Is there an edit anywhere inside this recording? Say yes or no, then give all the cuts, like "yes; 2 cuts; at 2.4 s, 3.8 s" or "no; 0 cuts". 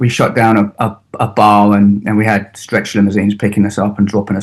no; 0 cuts